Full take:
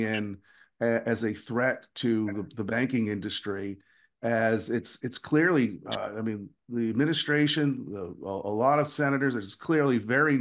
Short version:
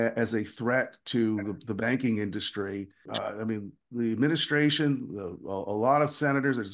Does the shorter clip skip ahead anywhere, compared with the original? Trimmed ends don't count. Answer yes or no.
yes